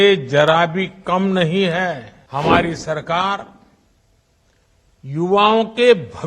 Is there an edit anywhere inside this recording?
yes; 1 cut; at 2.1 s

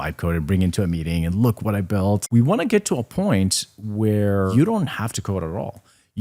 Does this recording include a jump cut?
yes; 2 cuts; at 2.2 s, 4.5 s

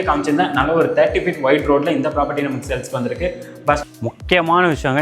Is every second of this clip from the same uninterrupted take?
no; 1 cut; at 3.8 s

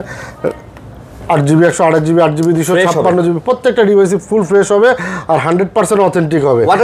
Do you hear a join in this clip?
no; 0 cuts

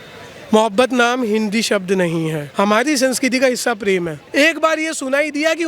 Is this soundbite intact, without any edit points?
no; 2 cuts; at 2.4 s, 4.2 s

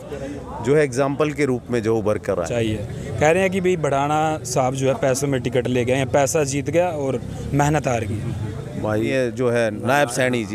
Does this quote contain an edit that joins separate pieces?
yes; 2 cuts; at 2.5 s, 9.1 s

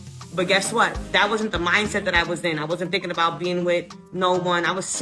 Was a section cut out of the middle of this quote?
no; 0 cuts

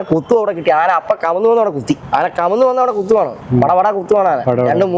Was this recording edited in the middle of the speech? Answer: yes; 1 cut; at 2.0 s

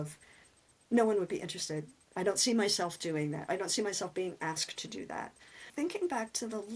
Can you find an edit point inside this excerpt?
yes; 1 cut; at 5.7 s

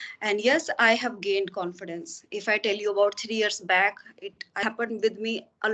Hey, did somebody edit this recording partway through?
yes; 1 cut; at 4.6 s

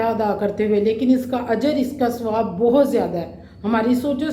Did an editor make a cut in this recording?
no; 0 cuts

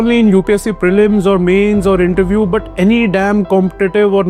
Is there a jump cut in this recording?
no; 0 cuts

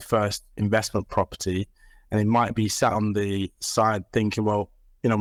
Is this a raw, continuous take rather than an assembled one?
yes; 0 cuts

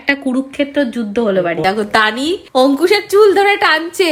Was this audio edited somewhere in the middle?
yes; 1 cut; at 1.6 s

